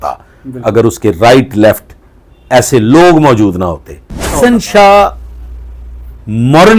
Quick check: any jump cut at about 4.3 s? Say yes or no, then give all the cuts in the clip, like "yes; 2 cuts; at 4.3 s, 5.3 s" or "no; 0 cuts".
yes; 1 cut; at 4.3 s